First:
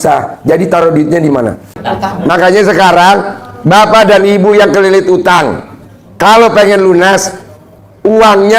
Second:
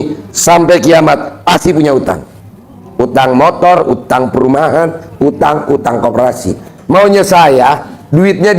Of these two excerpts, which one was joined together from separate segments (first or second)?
first